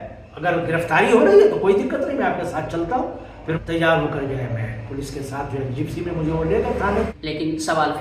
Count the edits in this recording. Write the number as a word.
two